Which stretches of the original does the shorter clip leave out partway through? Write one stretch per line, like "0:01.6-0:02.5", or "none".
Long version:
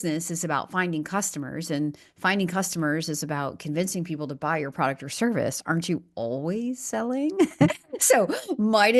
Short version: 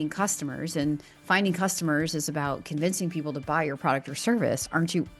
none